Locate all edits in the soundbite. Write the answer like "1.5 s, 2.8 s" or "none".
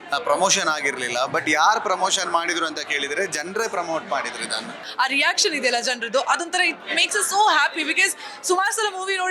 4.8 s